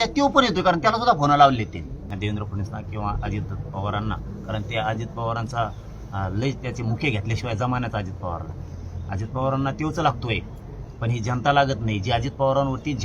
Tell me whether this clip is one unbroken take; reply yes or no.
no